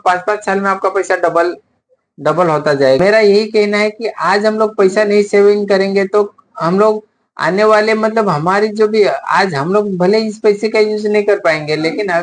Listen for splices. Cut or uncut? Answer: cut